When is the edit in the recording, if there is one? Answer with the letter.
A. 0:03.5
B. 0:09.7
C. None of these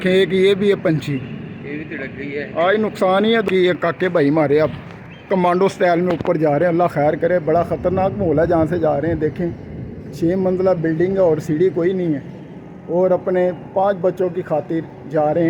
A